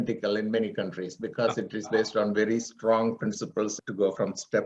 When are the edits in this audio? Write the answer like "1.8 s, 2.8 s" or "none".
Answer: 3.7 s